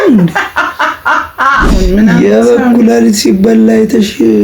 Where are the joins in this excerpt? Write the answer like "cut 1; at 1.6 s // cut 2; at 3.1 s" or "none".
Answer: cut 1; at 1.8 s